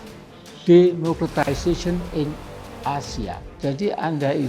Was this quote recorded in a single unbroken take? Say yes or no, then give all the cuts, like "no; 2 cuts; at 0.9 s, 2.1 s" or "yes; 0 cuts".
no; 1 cut; at 3.5 s